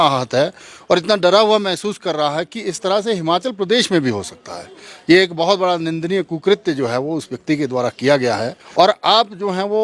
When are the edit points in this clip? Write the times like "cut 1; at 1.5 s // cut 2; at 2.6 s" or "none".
cut 1; at 8.6 s